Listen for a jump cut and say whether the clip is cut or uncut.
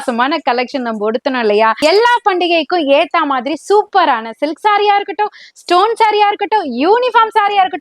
cut